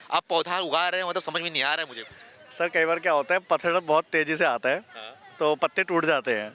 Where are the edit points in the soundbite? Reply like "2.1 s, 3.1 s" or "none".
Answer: none